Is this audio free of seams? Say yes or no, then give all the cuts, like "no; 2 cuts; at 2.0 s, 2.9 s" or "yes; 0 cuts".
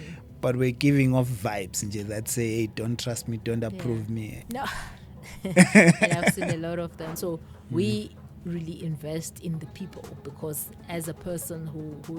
no; 2 cuts; at 4.4 s, 7.1 s